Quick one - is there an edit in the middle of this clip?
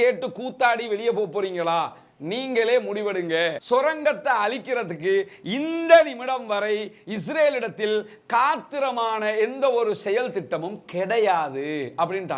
yes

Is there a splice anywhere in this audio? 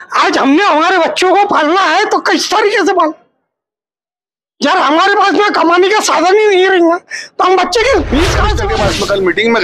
yes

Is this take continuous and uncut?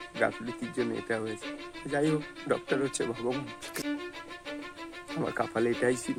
yes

